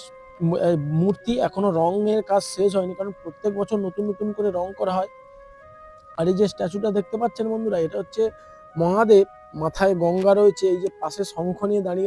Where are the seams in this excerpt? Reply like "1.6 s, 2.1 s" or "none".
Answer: none